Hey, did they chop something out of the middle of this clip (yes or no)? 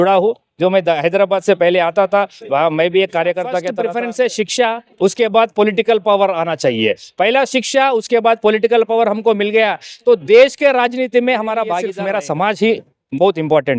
yes